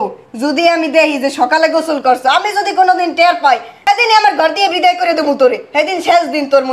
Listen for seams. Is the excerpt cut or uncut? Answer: cut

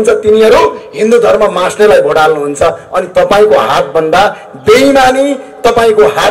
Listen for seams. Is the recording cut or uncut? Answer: uncut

